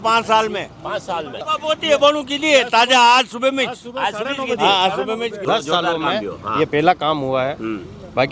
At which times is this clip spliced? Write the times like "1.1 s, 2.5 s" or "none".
1.4 s, 5.4 s